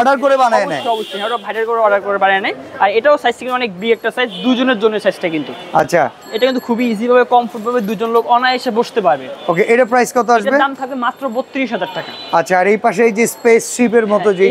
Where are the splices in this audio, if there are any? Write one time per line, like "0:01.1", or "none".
none